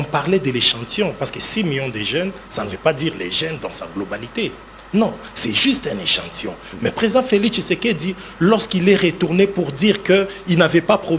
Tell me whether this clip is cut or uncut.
uncut